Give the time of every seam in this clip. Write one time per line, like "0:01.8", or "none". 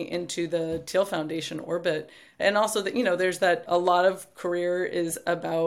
none